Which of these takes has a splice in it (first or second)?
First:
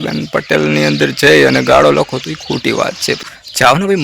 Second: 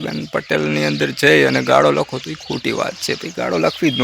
first